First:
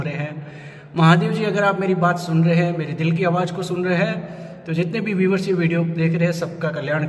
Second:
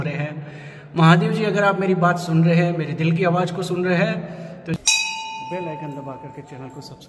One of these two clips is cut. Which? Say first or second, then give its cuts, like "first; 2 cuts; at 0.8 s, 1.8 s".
second; 1 cut; at 4.7 s